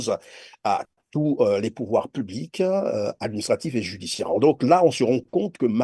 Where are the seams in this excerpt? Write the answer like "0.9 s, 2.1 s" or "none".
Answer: none